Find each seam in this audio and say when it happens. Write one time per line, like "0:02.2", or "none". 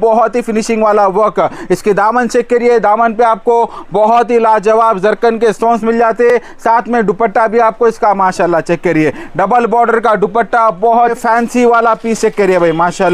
0:11.2